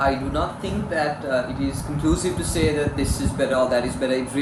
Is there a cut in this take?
no; 0 cuts

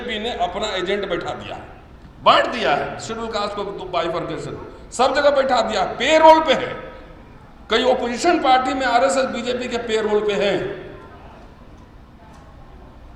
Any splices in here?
no; 0 cuts

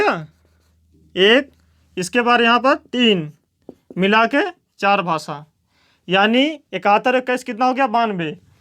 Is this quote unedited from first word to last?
yes; 0 cuts

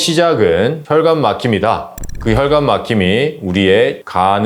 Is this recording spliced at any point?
no; 0 cuts

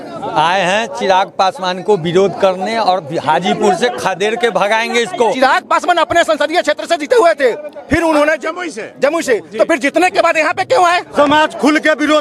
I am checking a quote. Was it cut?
yes; 2 cuts; at 5.4 s, 11.1 s

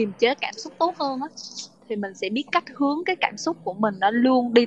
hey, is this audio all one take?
yes; 0 cuts

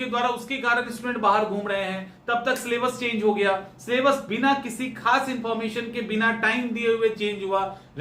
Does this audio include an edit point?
no; 0 cuts

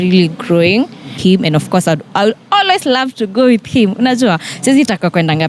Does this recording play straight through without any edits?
no; 1 cut; at 1.1 s

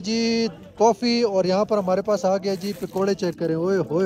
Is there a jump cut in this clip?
no; 0 cuts

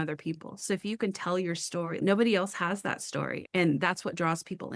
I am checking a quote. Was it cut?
yes; 2 cuts; at 1.9 s, 3.4 s

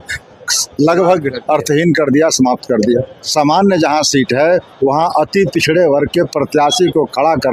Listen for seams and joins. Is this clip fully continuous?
no; 1 cut; at 3.2 s

